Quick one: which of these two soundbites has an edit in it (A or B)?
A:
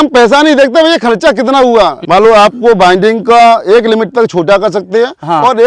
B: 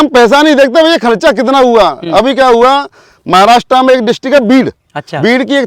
A